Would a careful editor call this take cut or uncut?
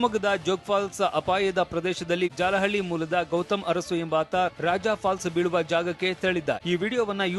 cut